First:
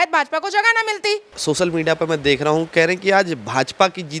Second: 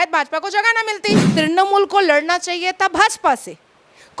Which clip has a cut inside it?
second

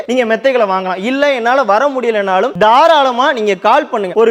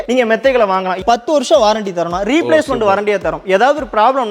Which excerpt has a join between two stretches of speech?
second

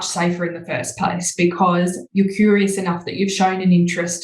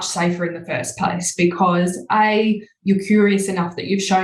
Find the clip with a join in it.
first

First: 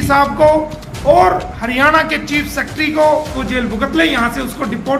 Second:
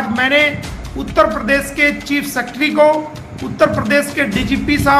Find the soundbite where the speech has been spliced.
first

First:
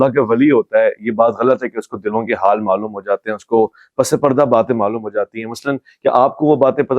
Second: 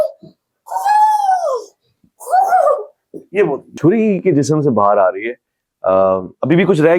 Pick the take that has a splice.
second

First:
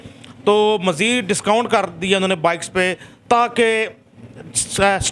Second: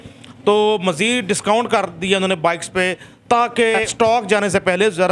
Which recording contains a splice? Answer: second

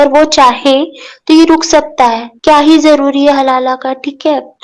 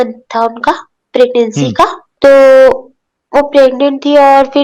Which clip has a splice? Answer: second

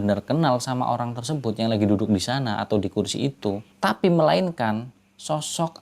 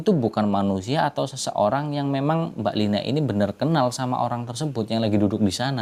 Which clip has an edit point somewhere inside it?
first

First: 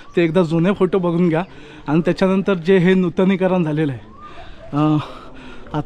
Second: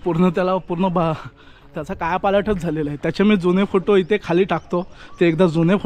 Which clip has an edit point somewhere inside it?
first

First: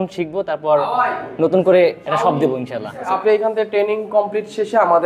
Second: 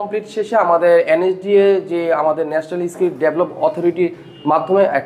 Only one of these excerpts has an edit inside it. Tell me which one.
first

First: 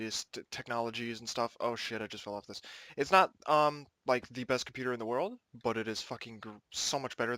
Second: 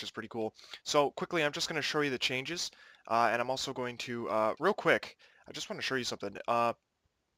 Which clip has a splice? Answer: first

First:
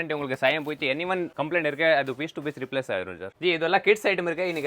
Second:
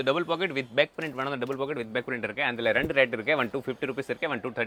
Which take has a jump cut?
first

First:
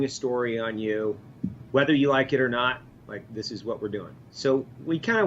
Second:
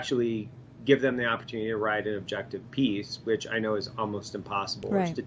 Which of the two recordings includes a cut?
first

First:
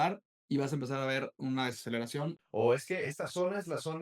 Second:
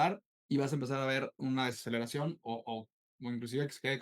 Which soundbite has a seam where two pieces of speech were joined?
first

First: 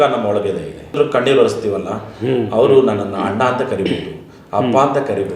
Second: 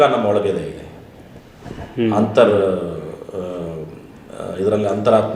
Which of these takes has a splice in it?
first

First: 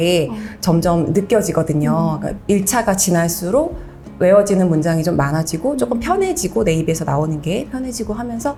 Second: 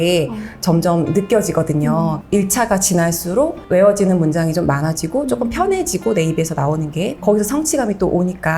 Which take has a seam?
second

